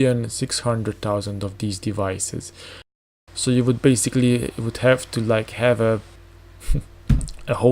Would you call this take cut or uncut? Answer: cut